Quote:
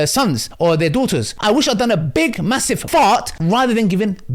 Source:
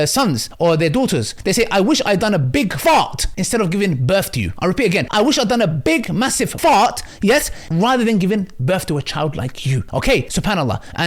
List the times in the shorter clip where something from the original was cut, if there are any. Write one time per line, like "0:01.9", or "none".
0:01.4
0:03.3